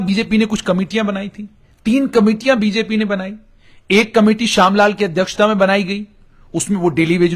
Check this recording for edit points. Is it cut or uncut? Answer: uncut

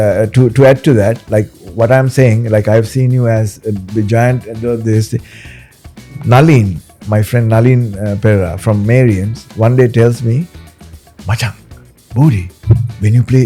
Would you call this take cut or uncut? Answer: uncut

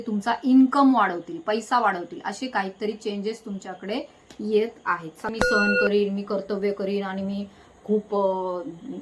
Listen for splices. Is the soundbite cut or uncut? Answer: cut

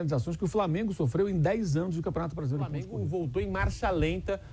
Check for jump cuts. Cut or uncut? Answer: cut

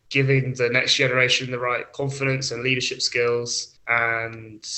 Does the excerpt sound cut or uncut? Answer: uncut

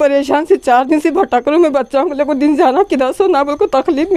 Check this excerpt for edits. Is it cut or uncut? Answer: uncut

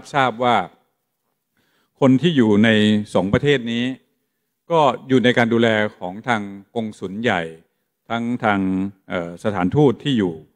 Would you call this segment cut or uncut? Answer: uncut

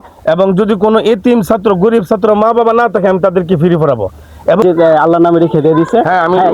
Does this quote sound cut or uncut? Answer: cut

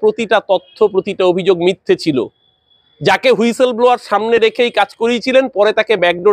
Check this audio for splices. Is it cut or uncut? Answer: uncut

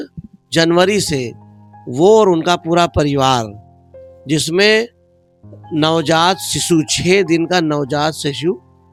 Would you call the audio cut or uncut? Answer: uncut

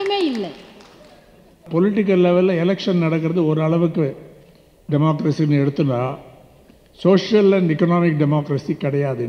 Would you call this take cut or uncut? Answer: cut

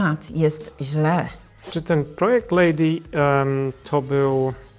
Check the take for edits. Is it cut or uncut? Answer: cut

